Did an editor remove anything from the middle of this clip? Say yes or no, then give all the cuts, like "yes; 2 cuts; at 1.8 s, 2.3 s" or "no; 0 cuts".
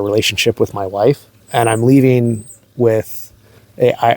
yes; 1 cut; at 1.4 s